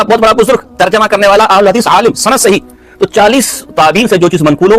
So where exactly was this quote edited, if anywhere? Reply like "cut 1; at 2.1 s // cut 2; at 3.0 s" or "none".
none